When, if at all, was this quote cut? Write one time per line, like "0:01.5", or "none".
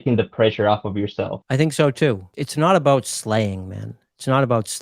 0:01.4
0:02.3